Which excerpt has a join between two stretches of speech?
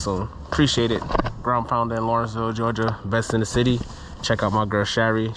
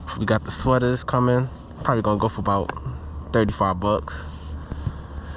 second; 1 cut; at 1.6 s

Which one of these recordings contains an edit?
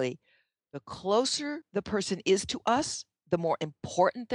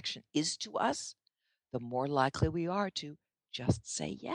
first; 1 cut; at 1.6 s

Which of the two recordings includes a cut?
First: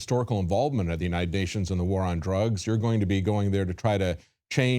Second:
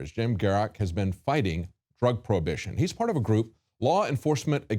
first; 1 cut; at 3.0 s

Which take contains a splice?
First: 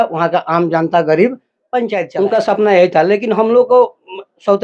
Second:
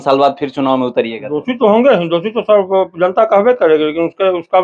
first; 1 cut; at 2.0 s

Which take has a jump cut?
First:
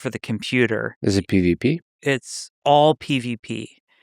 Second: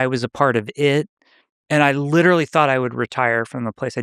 first; 1 cut; at 0.9 s

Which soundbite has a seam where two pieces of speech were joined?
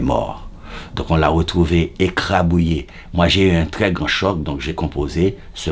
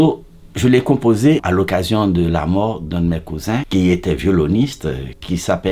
second; 3 cuts; at 1.4 s, 3.7 s, 4.8 s

